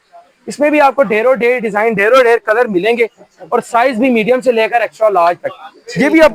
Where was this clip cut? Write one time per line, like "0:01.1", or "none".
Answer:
none